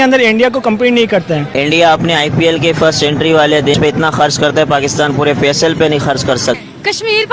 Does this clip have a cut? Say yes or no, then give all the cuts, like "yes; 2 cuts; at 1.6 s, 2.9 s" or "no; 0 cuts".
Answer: yes; 3 cuts; at 1.5 s, 3.7 s, 6.6 s